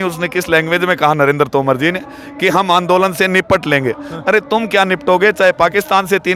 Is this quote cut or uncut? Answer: uncut